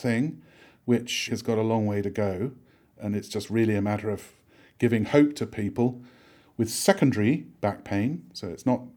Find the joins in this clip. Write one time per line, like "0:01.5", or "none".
0:01.3